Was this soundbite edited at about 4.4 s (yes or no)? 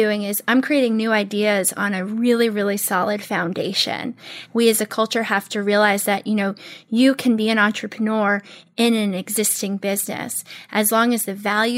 yes